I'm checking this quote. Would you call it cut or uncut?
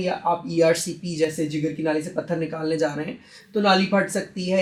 uncut